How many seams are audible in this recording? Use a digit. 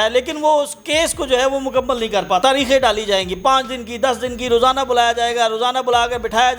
1